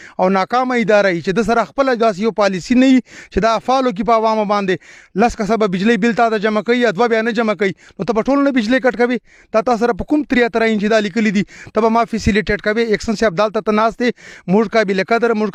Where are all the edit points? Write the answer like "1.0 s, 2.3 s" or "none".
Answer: none